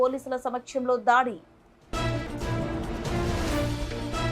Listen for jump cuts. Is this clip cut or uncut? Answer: uncut